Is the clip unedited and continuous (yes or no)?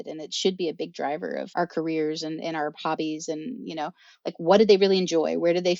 no